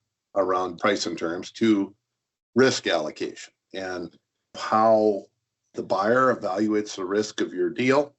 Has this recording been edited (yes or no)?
yes